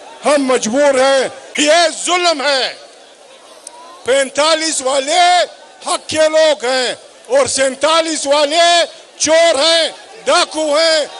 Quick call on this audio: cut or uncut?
cut